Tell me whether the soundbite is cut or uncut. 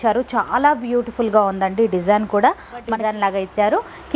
cut